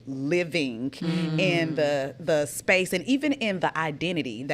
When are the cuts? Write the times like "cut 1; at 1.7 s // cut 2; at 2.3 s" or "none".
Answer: none